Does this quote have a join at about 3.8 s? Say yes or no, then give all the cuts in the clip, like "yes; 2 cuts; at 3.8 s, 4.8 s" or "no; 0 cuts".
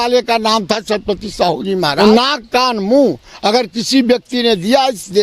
no; 1 cut; at 1.9 s